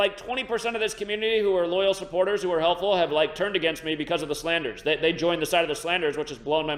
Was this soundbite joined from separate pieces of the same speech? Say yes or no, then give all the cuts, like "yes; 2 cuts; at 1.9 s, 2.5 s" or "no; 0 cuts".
no; 0 cuts